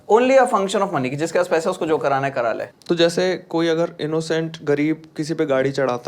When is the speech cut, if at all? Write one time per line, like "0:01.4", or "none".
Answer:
0:02.7